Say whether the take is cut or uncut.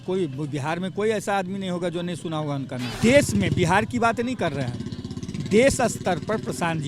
cut